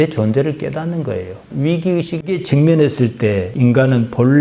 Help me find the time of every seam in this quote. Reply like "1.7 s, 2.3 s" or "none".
1.5 s, 2.4 s

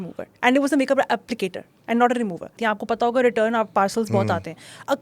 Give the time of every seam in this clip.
2.5 s

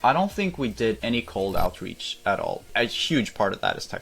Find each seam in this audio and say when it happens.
1.0 s, 2.6 s

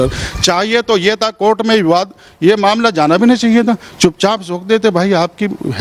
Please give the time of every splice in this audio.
none

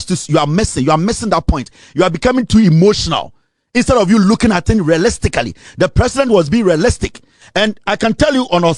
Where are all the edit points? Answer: none

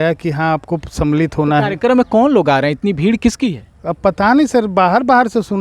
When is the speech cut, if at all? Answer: none

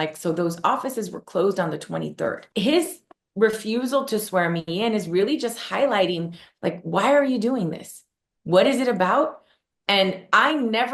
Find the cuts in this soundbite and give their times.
2.4 s

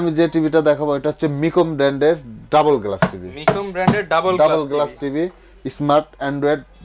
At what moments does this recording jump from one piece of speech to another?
none

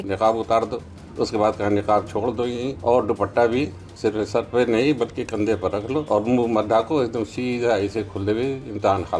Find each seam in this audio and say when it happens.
1.0 s, 2.7 s, 3.8 s, 6.1 s

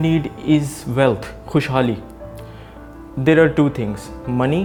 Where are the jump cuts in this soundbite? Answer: none

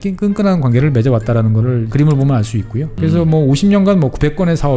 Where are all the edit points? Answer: 1.9 s, 2.9 s

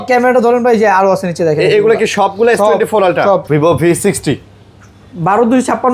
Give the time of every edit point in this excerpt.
3.4 s

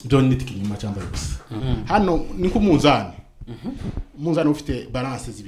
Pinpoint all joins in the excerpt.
1.7 s

